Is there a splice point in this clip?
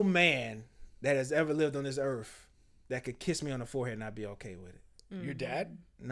no; 0 cuts

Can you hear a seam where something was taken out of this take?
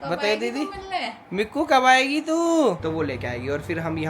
yes; 1 cut; at 2.8 s

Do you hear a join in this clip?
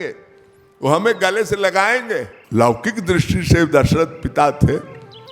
yes; 1 cut; at 2.4 s

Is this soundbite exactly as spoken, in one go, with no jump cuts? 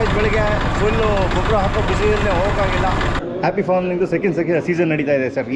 no; 1 cut; at 3.1 s

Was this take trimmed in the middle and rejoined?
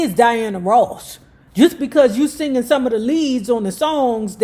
no; 0 cuts

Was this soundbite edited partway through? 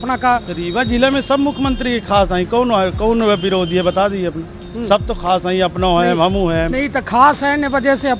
no; 0 cuts

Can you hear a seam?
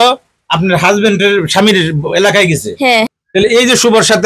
yes; 1 cut; at 3.1 s

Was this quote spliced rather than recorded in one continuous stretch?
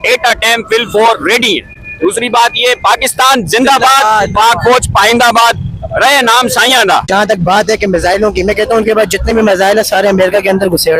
no; 0 cuts

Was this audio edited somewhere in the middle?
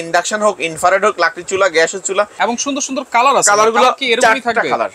yes; 1 cut; at 2.3 s

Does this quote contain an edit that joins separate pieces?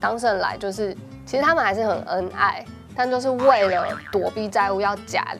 no; 0 cuts

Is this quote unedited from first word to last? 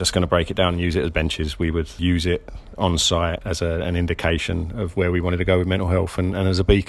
no; 2 cuts; at 2.0 s, 3.4 s

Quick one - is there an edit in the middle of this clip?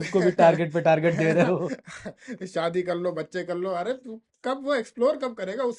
no; 0 cuts

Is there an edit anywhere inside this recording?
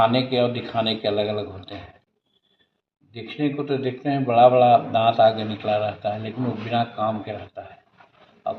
no; 0 cuts

